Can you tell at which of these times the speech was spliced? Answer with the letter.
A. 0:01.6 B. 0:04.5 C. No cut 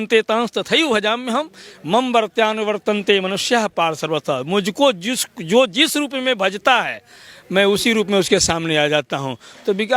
C